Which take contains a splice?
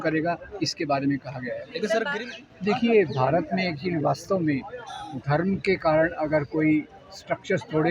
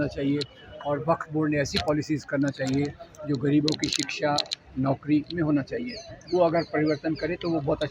first; 1 cut; at 2.1 s

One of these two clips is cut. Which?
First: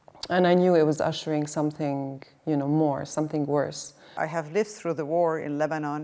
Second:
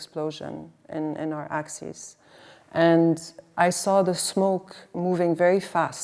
first; 1 cut; at 4.1 s

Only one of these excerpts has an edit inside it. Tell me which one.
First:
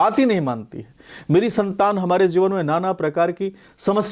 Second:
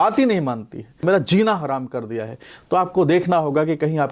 second; 1 cut; at 1.0 s

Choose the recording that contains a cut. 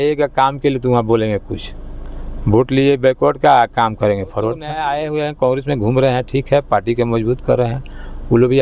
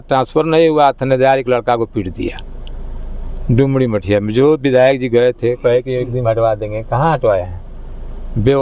first; 1 cut; at 4.8 s

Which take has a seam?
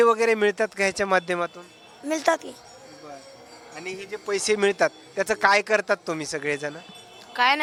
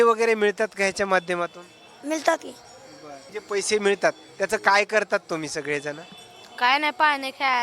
second; 1 cut; at 3.3 s

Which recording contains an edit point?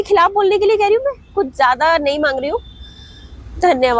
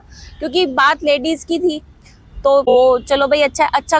second; 1 cut; at 2.7 s

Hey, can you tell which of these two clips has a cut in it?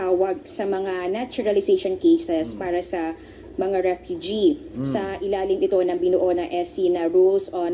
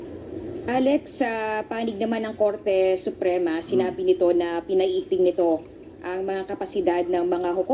first; 1 cut; at 2.9 s

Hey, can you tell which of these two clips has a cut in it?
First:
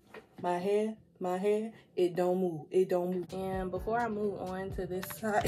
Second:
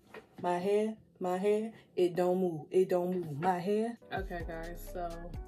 first; 1 cut; at 3.3 s

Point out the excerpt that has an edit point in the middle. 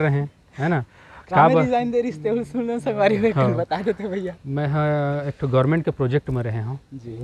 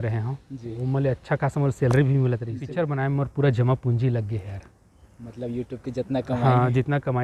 second; 1 cut; at 2.6 s

